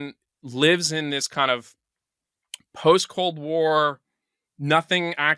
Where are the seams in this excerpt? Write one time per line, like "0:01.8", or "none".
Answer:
none